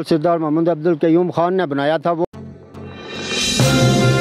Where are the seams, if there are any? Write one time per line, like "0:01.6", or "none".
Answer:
0:02.2

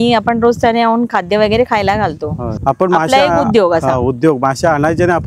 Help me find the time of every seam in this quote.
0:02.5

